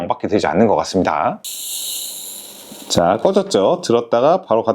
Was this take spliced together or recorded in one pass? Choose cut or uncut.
cut